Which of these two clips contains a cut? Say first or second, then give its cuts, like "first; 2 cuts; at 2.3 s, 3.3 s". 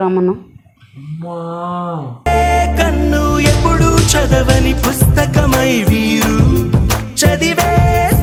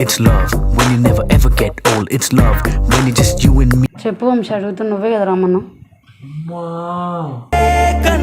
second; 1 cut; at 4.0 s